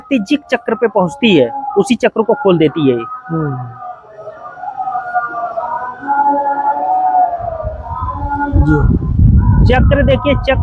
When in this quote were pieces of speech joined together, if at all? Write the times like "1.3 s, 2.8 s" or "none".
none